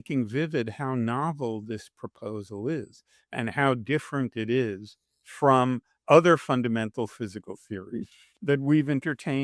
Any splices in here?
no; 0 cuts

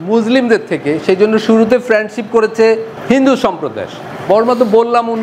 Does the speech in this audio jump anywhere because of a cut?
yes; 2 cuts; at 2.9 s, 4.1 s

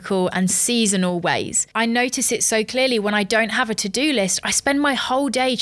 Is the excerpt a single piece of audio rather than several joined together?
no; 1 cut; at 1.7 s

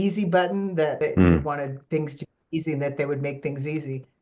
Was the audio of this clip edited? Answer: yes; 1 cut; at 1.0 s

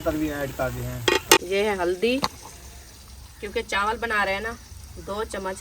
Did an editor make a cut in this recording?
yes; 1 cut; at 1.4 s

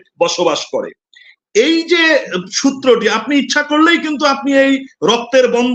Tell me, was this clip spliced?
no; 0 cuts

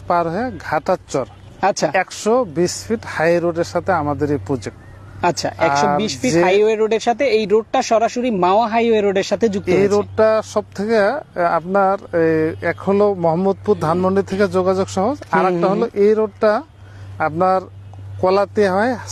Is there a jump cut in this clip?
no; 0 cuts

